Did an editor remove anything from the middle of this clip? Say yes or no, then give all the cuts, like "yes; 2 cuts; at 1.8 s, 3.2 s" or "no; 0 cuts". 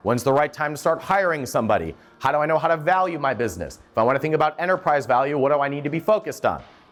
no; 0 cuts